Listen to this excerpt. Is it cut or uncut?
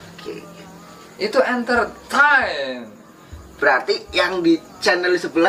uncut